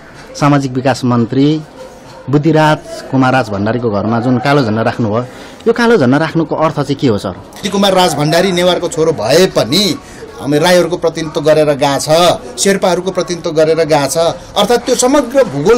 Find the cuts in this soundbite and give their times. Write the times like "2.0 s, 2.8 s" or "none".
7.6 s